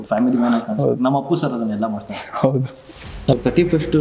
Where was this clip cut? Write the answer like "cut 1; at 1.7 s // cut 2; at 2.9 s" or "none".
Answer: cut 1; at 2.9 s

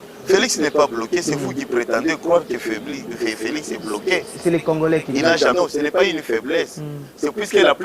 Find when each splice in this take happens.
cut 1; at 5.5 s

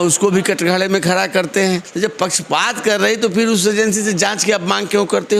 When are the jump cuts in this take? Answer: cut 1; at 1.9 s

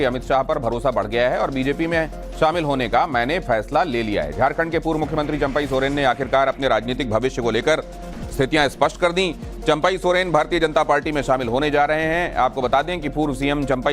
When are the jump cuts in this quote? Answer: cut 1; at 11.9 s

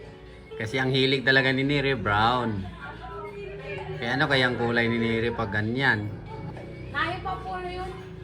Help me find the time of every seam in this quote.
cut 1; at 6.5 s

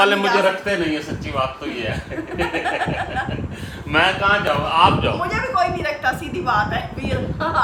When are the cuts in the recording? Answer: none

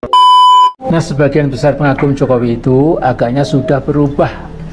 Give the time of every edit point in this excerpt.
cut 1; at 0.9 s

